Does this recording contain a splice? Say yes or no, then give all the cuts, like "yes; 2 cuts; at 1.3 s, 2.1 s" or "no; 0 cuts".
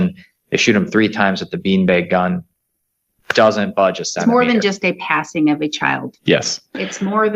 yes; 1 cut; at 4.2 s